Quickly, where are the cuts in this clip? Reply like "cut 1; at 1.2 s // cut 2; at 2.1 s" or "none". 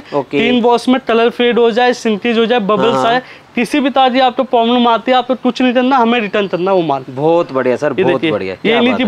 none